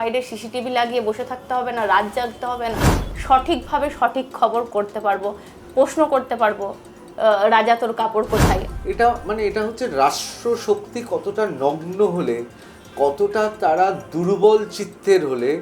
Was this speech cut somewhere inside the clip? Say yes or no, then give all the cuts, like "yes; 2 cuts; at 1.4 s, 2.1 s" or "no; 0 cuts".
yes; 2 cuts; at 3.0 s, 8.7 s